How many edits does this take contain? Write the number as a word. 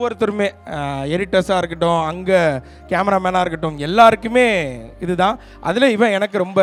zero